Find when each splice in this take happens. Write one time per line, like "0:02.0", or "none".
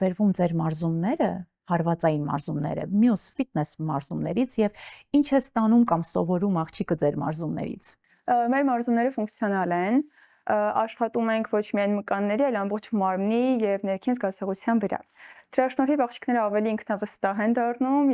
none